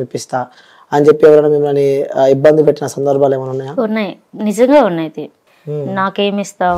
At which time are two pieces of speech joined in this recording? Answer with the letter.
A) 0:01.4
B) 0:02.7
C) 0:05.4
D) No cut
C